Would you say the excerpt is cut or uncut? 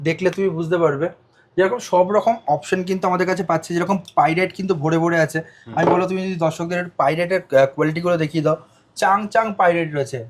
uncut